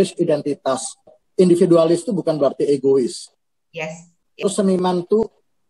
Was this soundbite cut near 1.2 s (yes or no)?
yes